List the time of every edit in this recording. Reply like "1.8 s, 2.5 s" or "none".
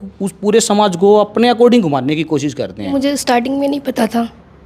2.9 s